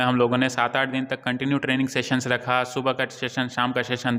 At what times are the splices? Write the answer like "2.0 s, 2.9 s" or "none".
none